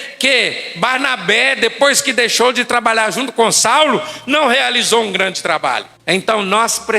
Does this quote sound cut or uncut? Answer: cut